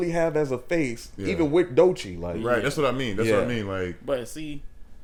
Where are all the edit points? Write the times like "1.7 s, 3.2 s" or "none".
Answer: none